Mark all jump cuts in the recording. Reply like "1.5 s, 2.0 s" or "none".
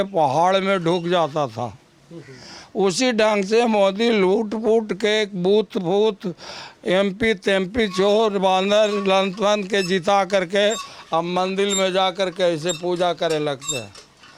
none